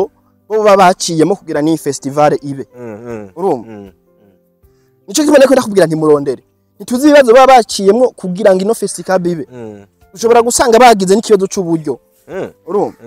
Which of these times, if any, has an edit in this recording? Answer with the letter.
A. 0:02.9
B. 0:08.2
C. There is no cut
C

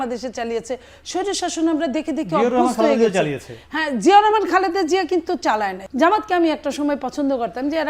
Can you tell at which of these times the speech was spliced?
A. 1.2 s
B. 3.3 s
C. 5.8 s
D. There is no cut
C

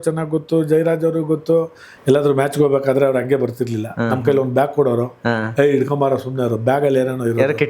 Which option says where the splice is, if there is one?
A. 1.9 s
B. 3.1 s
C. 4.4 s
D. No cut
A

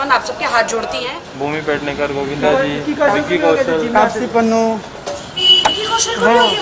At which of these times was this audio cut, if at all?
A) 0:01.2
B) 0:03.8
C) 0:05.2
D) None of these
A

